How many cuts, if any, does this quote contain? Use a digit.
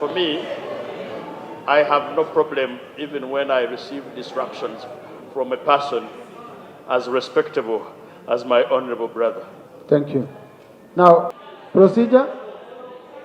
1